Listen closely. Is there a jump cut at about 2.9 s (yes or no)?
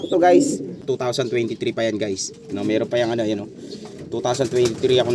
no